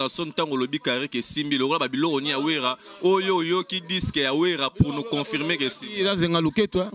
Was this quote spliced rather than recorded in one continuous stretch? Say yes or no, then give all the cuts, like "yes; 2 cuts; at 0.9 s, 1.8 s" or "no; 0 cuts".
no; 0 cuts